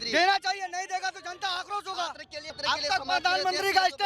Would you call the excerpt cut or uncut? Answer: cut